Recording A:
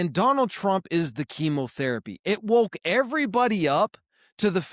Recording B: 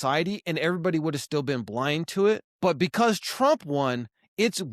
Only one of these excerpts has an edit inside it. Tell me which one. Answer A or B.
B